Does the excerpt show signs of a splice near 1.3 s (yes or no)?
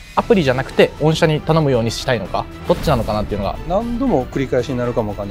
no